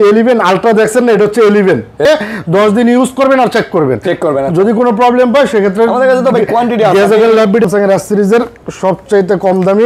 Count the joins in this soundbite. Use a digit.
2